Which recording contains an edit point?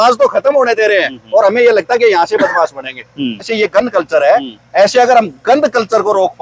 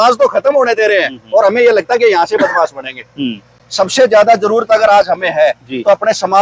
first; 1 cut; at 3.5 s

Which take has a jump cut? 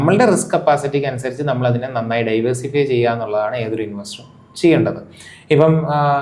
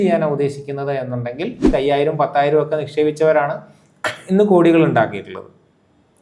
second; 1 cut; at 1.6 s

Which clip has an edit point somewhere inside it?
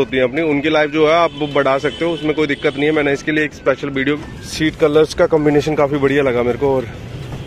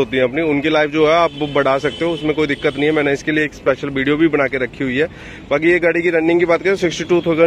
first; 1 cut; at 4.2 s

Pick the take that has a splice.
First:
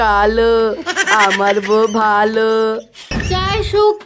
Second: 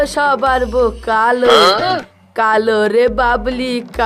first; 1 cut; at 3.1 s

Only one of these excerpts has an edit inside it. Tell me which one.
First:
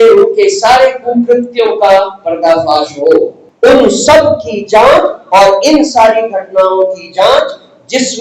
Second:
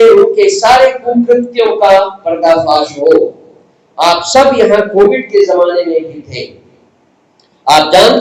first; 1 cut; at 3.4 s

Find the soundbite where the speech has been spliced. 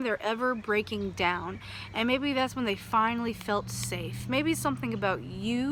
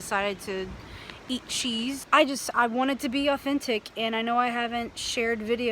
second; 1 cut; at 2.0 s

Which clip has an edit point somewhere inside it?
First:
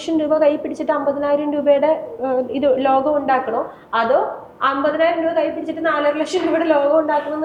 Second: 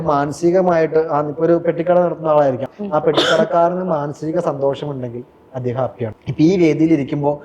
second; 2 cuts; at 2.7 s, 6.2 s

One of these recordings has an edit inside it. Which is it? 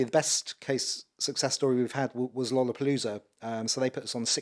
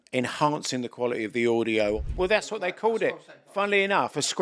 second; 1 cut; at 2.0 s

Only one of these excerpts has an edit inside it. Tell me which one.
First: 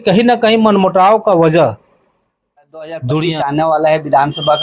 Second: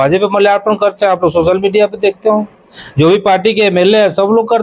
first; 1 cut; at 3.4 s

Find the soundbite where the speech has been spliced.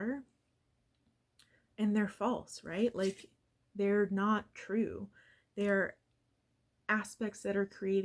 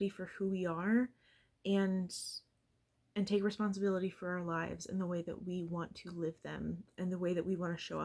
second; 1 cut; at 6.9 s

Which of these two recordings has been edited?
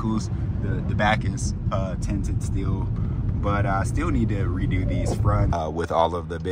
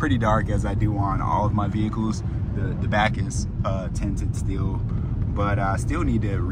first; 1 cut; at 5.5 s

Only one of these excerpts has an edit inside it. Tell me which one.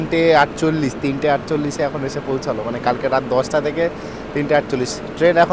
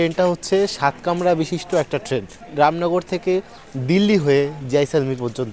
second; 1 cut; at 2.5 s

